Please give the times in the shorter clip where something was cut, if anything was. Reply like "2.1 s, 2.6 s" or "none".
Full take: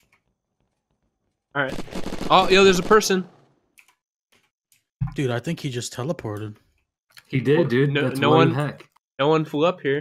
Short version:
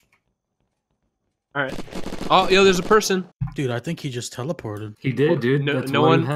3.4 s, 4.9 s